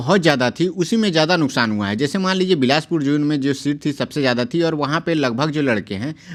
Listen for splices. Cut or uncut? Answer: uncut